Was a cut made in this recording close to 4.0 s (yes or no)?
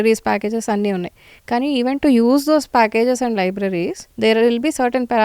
yes